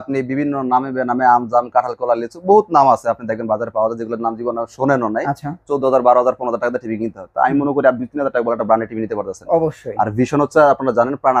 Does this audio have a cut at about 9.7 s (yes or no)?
no